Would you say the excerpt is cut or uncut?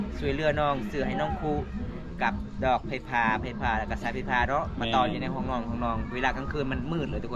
uncut